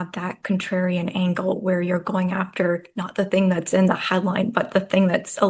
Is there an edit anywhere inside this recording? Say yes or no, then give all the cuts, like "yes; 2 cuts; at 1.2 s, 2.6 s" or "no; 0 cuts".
no; 0 cuts